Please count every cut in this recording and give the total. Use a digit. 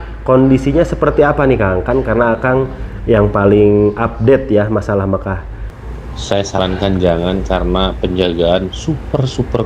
1